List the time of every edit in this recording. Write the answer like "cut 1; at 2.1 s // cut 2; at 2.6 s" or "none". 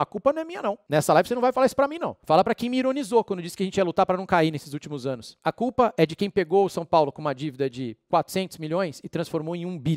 cut 1; at 0.8 s // cut 2; at 2.1 s // cut 3; at 5.4 s